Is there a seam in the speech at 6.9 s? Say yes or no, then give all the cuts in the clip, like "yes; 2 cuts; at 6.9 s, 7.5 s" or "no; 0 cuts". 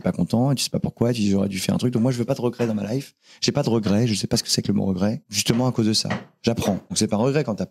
yes; 2 cuts; at 5.3 s, 6.9 s